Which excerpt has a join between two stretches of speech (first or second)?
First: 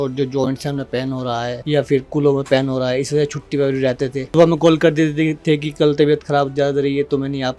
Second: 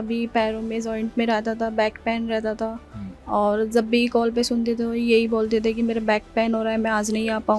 first